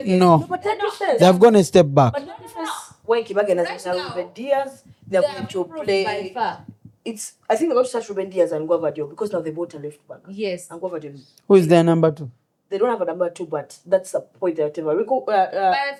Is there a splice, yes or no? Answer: no